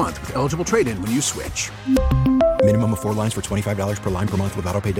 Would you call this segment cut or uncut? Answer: uncut